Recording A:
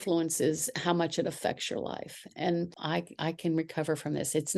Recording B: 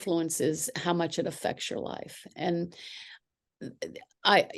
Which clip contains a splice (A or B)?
A